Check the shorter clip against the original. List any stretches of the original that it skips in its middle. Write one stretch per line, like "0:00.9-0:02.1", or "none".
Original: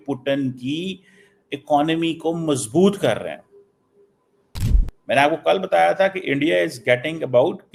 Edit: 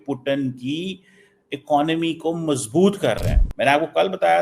0:03.4-0:04.9